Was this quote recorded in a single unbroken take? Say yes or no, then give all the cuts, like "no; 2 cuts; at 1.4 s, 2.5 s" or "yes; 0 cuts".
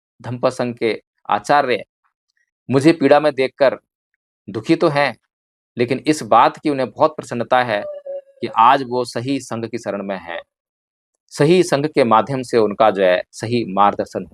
yes; 0 cuts